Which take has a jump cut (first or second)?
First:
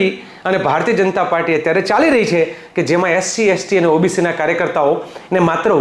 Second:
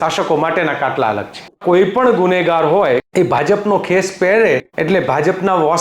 second